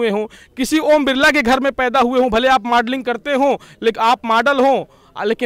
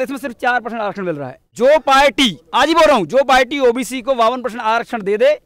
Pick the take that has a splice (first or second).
second